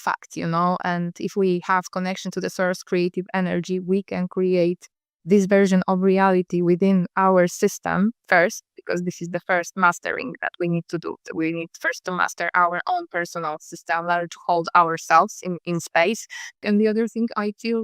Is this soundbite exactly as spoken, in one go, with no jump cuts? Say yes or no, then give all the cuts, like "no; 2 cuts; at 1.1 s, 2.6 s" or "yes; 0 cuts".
no; 1 cut; at 16.6 s